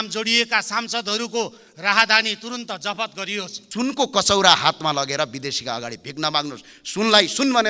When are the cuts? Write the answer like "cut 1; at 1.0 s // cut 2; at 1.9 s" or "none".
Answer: cut 1; at 3.6 s